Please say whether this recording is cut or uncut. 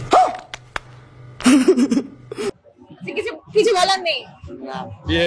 uncut